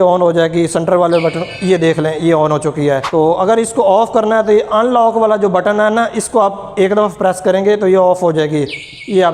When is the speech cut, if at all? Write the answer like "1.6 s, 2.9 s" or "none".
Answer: none